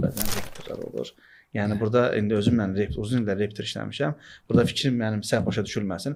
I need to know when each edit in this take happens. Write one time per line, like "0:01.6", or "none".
none